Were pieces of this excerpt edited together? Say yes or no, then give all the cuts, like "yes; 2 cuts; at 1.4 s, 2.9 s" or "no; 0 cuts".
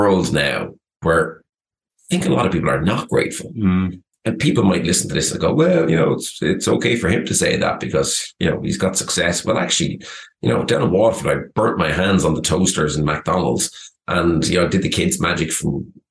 yes; 1 cut; at 1.0 s